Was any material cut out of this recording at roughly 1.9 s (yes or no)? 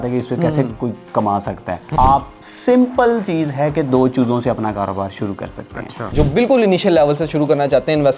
yes